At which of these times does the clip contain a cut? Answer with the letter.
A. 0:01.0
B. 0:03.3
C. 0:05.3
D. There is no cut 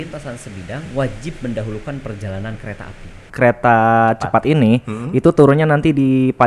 B